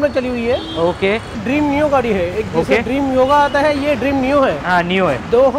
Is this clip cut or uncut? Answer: cut